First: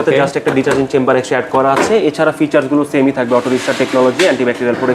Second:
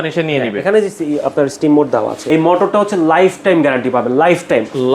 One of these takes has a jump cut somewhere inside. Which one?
second; 1 cut; at 2.2 s

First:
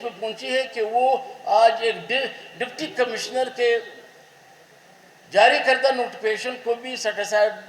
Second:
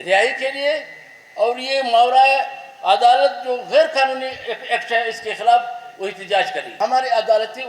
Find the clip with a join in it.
second; 1 cut; at 6.6 s

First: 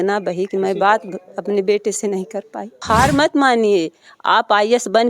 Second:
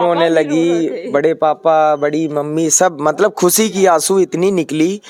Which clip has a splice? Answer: first; 1 cut; at 2.8 s

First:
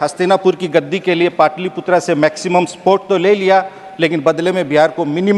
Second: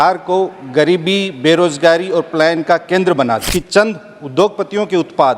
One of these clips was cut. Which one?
second; 1 cut; at 3.5 s

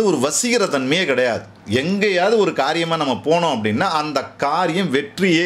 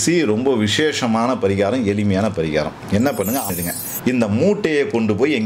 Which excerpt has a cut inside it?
second; 1 cut; at 3.5 s

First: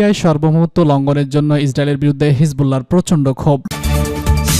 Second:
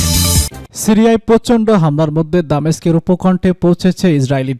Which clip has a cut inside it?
first; 1 cut; at 3.7 s

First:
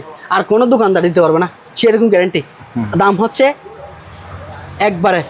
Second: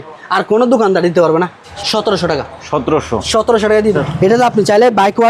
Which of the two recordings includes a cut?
second; 2 cuts; at 1.7 s, 3.9 s

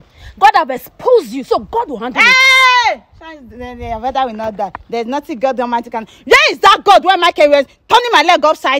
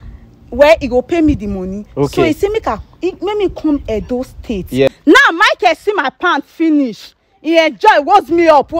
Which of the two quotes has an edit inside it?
second; 1 cut; at 4.9 s

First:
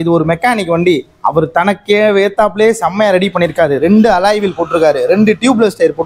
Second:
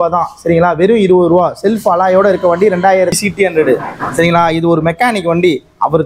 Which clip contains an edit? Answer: second; 1 cut; at 3.2 s

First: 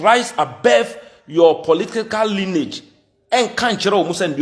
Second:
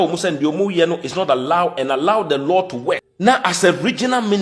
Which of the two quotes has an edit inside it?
second; 1 cut; at 3.1 s

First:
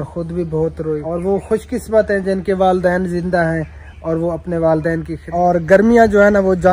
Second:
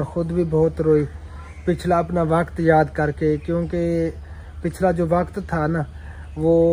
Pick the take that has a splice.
first; 2 cuts; at 1.0 s, 5.2 s

